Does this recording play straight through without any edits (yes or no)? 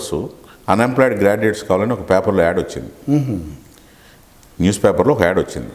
yes